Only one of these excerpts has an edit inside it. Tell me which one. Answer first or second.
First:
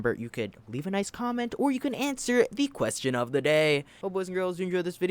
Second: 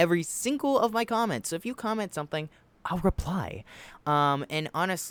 first